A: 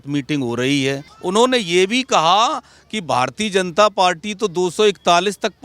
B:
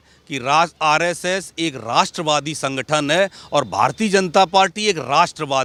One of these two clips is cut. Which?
A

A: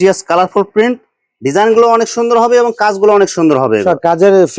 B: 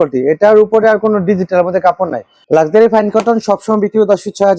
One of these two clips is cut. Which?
B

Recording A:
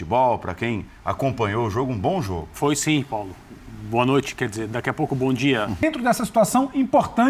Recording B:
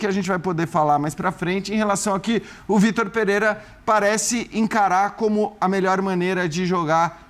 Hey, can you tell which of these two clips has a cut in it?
A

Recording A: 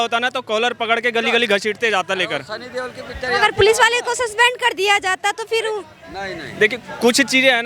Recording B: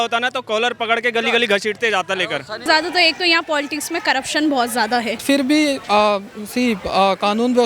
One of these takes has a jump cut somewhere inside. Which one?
B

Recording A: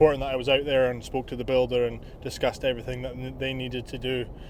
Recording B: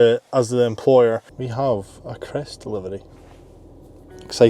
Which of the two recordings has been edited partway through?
B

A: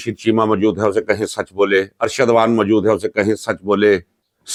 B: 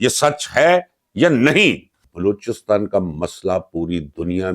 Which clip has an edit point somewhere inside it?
B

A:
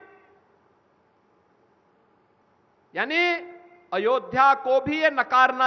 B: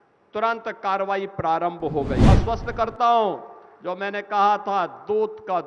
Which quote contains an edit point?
B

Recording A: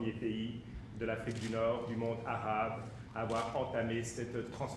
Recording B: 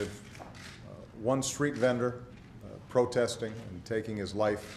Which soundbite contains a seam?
A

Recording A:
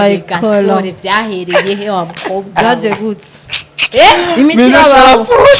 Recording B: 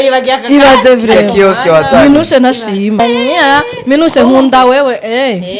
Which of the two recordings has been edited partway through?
B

